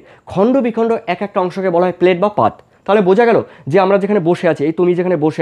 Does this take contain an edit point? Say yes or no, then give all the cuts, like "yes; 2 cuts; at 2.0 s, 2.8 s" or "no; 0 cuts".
no; 0 cuts